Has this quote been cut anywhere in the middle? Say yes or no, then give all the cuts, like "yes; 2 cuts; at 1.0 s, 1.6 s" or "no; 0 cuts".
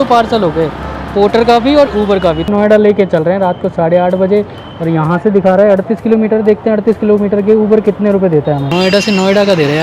yes; 3 cuts; at 1.0 s, 2.5 s, 8.7 s